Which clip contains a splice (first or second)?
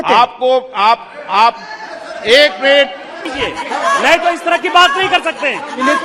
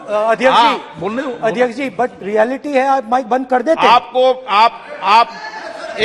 first